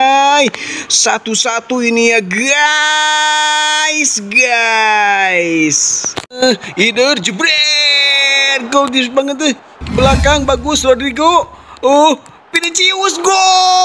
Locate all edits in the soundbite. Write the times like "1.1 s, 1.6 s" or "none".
6.4 s